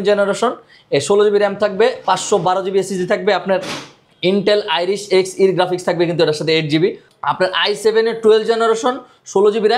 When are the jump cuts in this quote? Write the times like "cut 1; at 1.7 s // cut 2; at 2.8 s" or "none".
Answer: cut 1; at 7.1 s